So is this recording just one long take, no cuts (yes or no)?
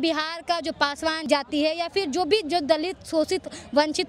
no